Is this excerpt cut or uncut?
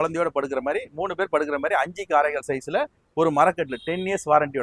uncut